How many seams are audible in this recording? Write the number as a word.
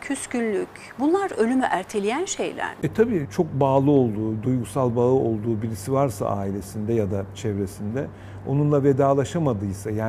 one